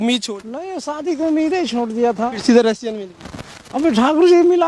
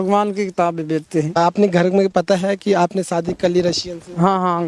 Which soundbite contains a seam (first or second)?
second